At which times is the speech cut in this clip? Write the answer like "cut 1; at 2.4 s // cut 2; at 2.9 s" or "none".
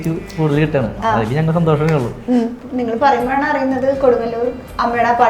cut 1; at 2.6 s